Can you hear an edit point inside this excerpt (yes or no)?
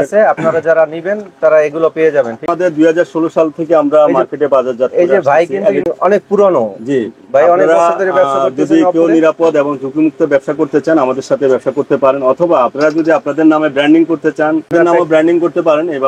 yes